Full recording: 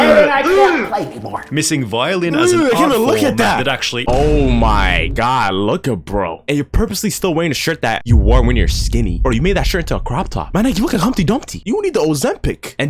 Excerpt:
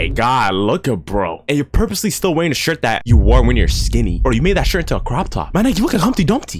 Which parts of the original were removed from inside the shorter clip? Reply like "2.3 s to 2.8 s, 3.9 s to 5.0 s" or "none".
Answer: none